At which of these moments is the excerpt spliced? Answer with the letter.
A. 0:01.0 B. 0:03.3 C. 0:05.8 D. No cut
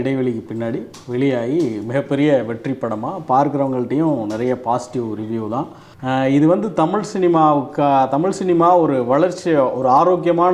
C